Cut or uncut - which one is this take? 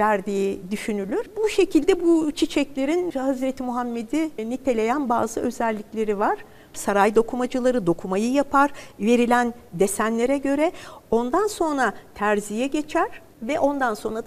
cut